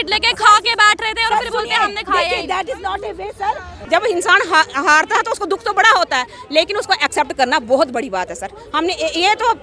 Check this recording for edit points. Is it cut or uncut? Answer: cut